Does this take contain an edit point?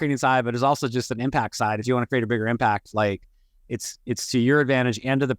no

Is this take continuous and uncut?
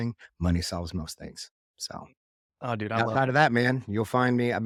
yes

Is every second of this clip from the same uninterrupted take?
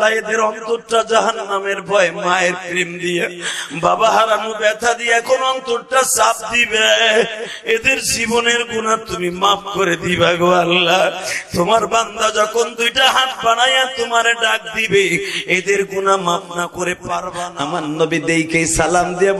no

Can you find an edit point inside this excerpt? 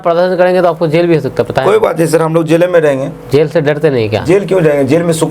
no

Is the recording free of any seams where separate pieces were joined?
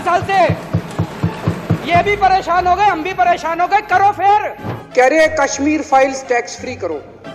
no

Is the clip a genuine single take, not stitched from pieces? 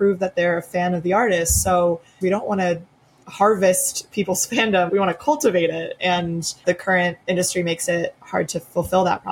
no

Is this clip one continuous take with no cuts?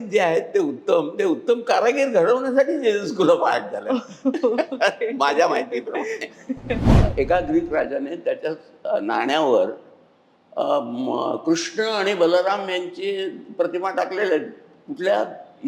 no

